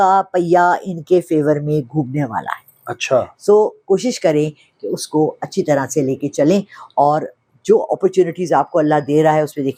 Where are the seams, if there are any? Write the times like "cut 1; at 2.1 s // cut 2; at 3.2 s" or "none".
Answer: none